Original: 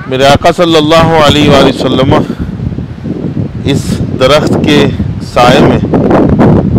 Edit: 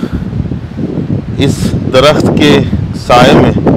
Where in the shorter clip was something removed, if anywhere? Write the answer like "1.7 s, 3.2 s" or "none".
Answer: none